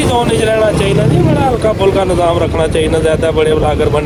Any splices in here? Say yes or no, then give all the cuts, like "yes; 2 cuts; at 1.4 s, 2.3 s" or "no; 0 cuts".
no; 0 cuts